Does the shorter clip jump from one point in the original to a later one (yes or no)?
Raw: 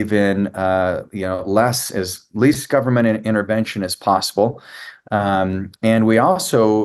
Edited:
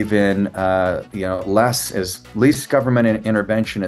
no